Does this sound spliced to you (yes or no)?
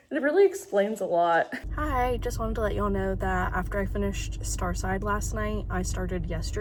no